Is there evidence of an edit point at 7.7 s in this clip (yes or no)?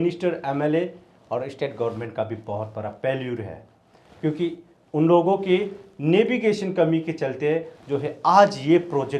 no